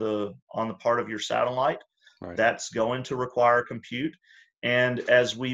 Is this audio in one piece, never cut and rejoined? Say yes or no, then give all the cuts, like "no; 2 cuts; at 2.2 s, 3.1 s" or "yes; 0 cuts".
yes; 0 cuts